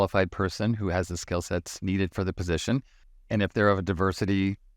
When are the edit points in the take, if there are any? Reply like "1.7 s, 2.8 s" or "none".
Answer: none